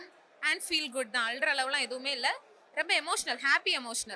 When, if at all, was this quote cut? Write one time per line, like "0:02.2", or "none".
none

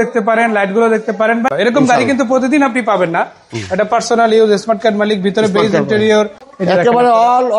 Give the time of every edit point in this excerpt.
0:01.5
0:06.4

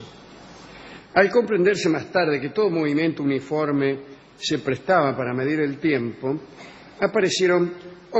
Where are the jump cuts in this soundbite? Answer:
0:07.1

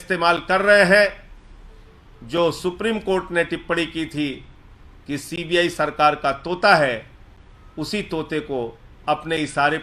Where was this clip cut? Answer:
none

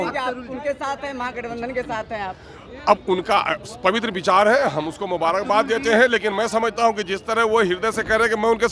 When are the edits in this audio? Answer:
none

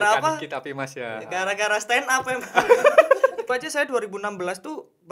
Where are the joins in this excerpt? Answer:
0:03.5

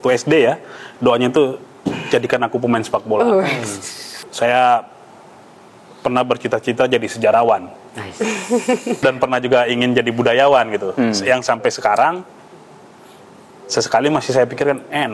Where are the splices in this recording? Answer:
0:04.1
0:09.0

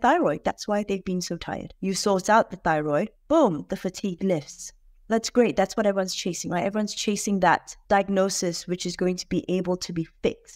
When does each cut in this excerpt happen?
0:01.7
0:07.7

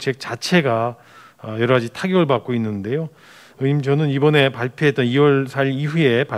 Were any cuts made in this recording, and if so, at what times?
none

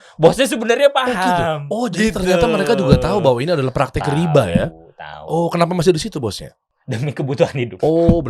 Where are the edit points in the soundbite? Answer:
0:06.6

